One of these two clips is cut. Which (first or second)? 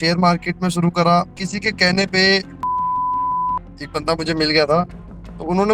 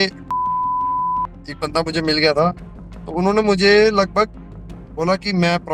first